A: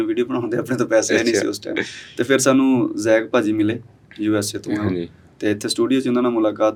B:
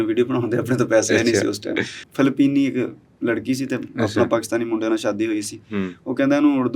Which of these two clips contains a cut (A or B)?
B